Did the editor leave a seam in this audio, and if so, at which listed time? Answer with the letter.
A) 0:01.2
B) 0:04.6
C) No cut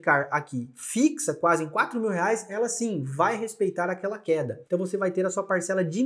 B